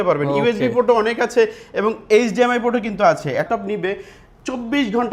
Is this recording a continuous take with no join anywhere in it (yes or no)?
no